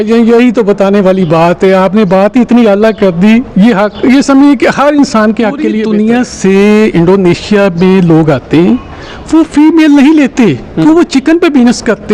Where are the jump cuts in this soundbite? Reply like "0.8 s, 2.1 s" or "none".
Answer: 5.8 s